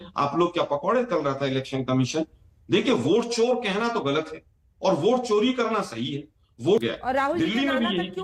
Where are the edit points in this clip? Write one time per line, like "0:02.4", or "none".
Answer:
0:06.8